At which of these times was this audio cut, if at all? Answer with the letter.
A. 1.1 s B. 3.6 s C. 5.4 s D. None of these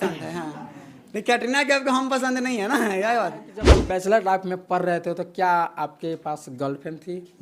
B